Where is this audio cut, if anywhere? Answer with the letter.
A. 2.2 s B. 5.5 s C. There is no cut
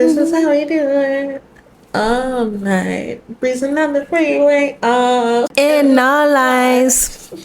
B